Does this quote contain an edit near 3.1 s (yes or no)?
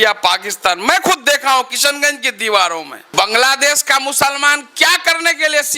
yes